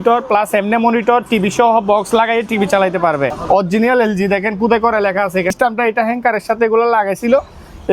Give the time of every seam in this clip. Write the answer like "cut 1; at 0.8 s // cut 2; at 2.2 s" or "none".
cut 1; at 3.4 s // cut 2; at 5.5 s